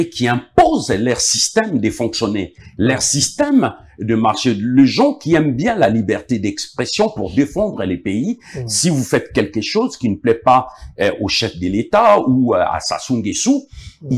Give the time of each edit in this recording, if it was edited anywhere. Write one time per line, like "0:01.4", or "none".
none